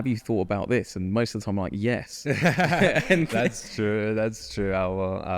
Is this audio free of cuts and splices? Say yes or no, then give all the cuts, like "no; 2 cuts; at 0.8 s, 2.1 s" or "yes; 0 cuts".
yes; 0 cuts